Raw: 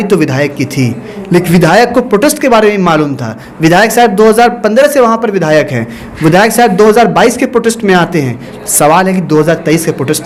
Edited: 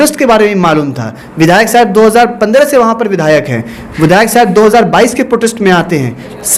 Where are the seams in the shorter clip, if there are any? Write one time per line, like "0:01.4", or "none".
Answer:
none